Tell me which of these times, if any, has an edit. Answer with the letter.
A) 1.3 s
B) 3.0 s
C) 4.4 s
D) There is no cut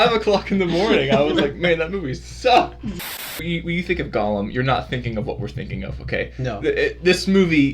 B